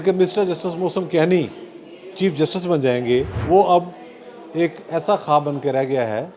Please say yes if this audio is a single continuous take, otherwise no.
no